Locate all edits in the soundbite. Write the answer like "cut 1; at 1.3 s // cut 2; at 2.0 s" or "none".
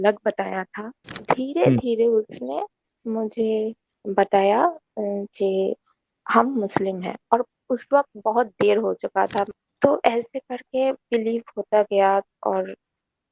cut 1; at 1.2 s // cut 2; at 9.5 s